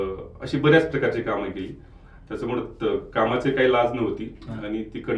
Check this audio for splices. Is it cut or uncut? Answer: uncut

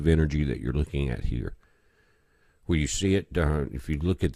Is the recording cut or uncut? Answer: cut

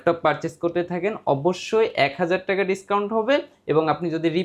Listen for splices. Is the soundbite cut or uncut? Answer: uncut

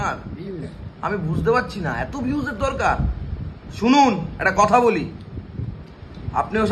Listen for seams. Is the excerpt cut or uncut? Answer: uncut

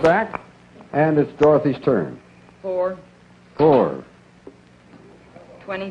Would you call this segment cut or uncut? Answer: cut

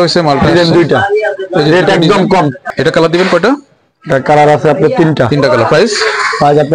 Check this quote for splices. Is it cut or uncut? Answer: cut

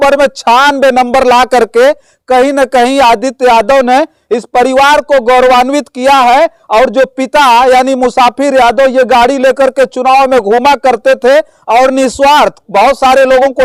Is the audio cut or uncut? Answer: uncut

